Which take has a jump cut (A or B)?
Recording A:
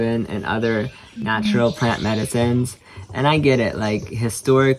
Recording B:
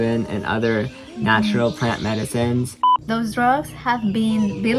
B